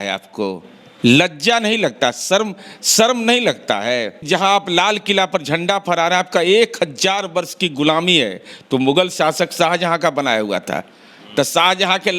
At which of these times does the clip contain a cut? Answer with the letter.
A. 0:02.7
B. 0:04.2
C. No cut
B